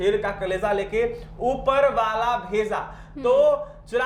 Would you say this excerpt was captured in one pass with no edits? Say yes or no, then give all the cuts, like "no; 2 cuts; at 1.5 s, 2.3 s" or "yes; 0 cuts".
yes; 0 cuts